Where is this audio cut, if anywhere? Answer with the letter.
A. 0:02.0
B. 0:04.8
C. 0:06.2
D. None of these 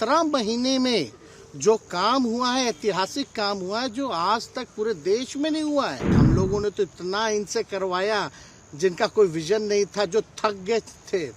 C